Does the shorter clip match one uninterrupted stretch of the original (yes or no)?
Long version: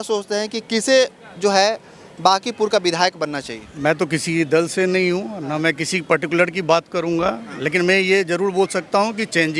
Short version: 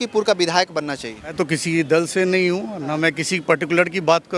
no